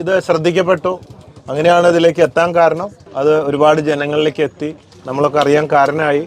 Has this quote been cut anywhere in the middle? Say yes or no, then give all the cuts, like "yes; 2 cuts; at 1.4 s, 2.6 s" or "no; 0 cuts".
no; 0 cuts